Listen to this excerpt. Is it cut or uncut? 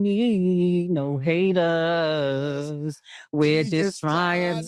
uncut